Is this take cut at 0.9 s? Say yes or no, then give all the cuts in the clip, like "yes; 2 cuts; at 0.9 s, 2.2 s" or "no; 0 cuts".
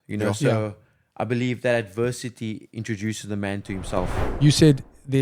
no; 1 cut; at 4.2 s